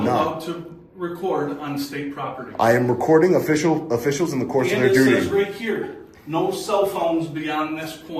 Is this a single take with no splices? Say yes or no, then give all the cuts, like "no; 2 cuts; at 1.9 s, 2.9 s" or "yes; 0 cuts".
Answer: yes; 0 cuts